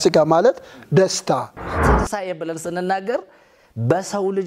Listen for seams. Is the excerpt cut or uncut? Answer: cut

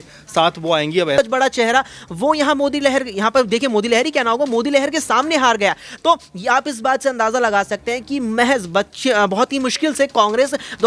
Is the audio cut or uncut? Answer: cut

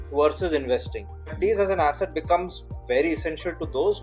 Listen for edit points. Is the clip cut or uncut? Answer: cut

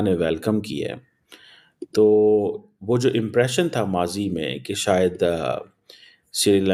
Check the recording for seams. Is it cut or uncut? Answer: uncut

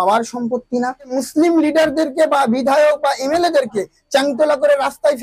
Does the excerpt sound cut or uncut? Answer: cut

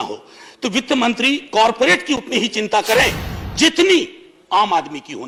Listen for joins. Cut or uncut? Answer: uncut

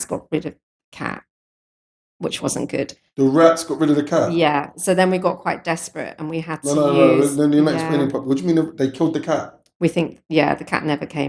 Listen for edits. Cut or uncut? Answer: uncut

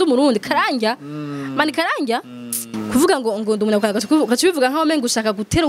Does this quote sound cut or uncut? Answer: cut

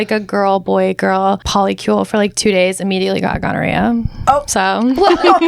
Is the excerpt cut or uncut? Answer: cut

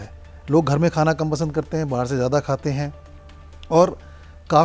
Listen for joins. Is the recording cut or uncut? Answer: uncut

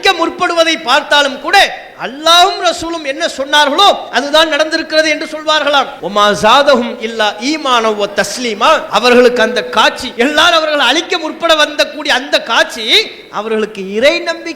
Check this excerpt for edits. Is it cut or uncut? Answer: cut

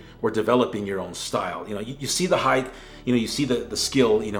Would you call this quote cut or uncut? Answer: uncut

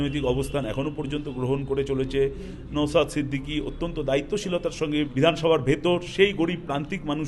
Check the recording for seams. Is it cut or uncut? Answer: cut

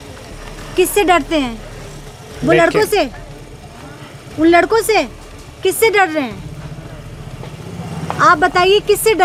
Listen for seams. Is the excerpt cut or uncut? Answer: uncut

